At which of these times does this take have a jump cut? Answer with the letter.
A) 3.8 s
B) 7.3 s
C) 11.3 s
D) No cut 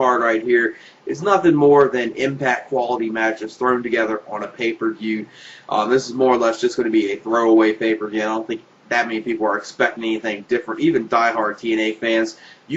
A